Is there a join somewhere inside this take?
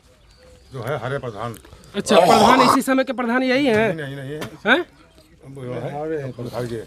no; 0 cuts

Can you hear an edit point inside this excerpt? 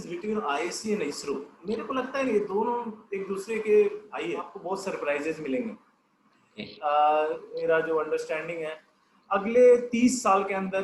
yes; 2 cuts; at 4.5 s, 7.6 s

